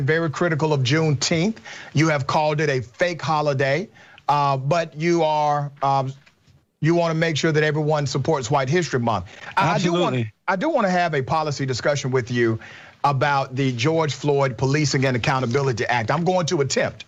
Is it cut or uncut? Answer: uncut